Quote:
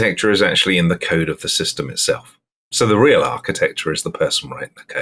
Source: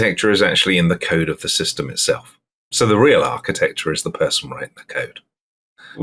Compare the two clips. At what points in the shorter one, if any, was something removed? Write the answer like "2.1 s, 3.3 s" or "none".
none